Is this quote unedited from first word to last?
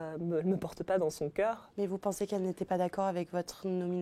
no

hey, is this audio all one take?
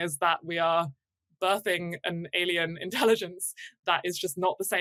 yes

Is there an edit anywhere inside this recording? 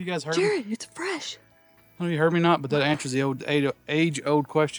no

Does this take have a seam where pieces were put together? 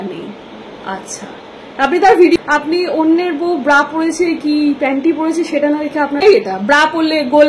yes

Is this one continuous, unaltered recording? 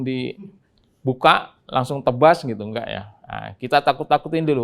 yes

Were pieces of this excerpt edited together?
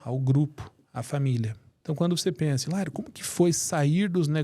yes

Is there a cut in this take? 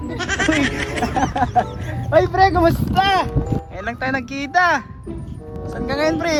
no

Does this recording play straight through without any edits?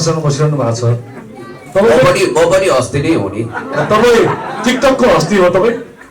yes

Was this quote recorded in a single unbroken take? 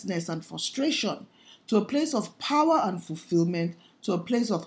yes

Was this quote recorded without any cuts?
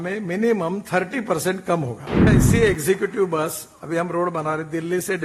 no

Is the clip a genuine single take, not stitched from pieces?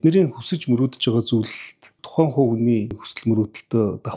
no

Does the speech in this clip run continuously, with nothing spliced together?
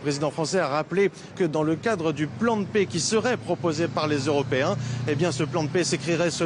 no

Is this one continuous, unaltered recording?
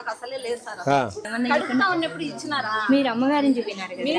no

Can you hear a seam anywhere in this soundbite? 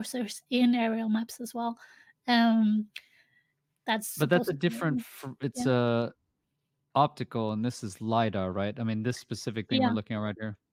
no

